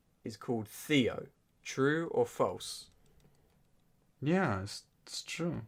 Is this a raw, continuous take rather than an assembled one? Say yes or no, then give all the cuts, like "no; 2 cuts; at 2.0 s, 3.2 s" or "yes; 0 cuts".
yes; 0 cuts